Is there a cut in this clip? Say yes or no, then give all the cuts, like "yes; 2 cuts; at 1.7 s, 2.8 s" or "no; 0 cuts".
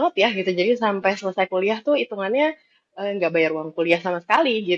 no; 0 cuts